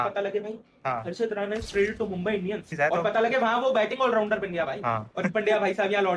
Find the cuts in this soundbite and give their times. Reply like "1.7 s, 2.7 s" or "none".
2.7 s, 5.1 s